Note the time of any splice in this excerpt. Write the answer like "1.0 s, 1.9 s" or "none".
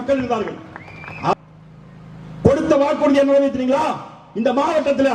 1.3 s